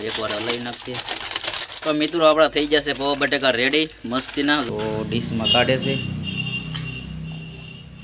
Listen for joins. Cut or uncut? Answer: cut